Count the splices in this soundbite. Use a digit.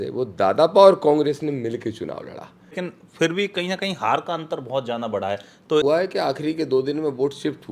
2